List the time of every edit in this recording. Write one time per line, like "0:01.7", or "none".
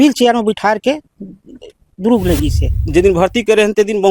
0:02.8